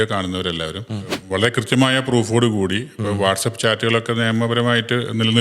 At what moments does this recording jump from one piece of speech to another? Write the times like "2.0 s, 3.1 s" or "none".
1.2 s